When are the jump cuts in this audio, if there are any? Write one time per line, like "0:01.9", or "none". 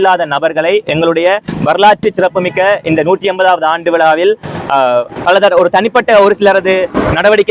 none